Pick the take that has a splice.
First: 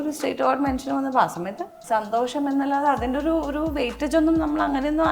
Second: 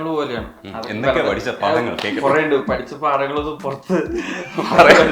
first; 1 cut; at 1.7 s

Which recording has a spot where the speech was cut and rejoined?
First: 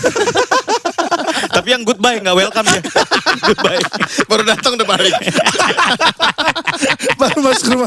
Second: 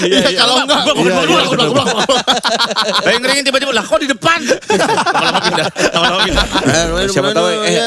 second; 1 cut; at 6.6 s

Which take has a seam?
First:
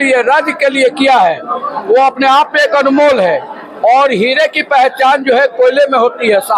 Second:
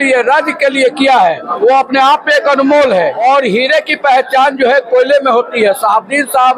second; 2 cuts; at 1.5 s, 3.2 s

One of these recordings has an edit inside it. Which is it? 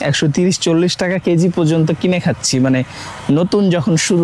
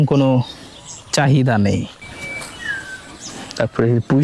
second; 1 cut; at 2.4 s

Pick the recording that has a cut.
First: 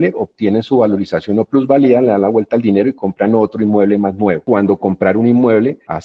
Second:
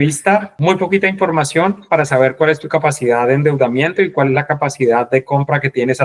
first; 1 cut; at 4.4 s

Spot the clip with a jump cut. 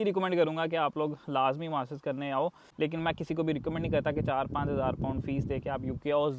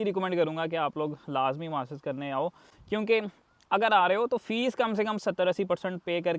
first; 1 cut; at 2.6 s

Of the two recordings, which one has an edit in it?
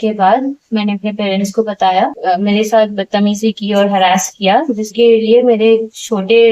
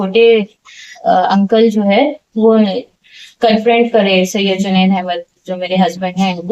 first; 1 cut; at 2.2 s

